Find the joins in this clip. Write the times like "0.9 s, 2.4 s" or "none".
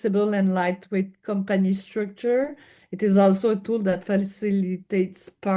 none